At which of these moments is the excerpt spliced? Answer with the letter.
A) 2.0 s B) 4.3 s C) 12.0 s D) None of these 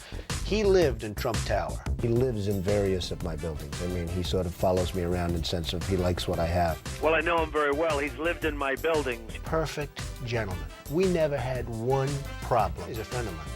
A